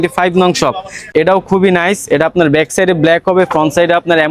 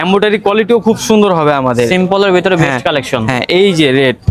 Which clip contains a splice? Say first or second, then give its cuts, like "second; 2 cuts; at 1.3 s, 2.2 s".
first; 1 cut; at 1.0 s